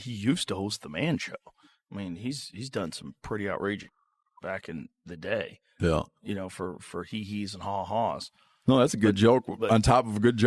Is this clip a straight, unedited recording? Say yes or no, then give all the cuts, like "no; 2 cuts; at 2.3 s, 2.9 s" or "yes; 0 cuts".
yes; 0 cuts